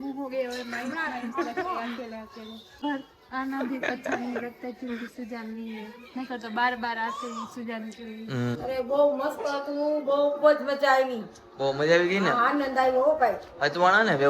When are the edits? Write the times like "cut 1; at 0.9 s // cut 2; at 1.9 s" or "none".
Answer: cut 1; at 2.8 s // cut 2; at 8.6 s